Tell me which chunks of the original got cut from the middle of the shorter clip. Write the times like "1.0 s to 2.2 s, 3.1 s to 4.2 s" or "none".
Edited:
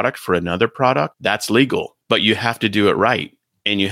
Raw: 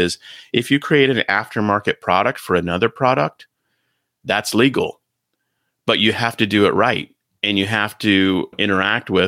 3.4 s to 4.2 s, 5.0 s to 5.7 s